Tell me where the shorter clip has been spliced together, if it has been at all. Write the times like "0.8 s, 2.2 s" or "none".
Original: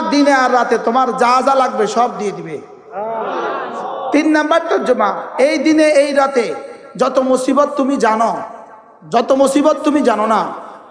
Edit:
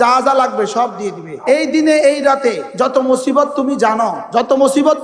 1.3 s, 2.6 s, 4.2 s